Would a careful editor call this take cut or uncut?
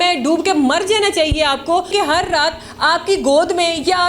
cut